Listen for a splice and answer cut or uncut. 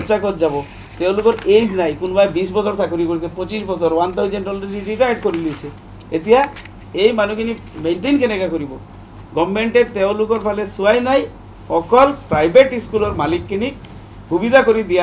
uncut